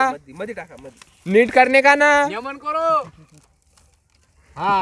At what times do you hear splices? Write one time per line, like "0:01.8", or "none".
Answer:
none